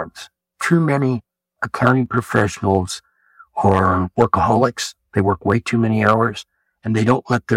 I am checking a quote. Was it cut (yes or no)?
no